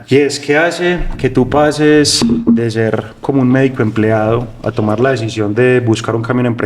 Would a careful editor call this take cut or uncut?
uncut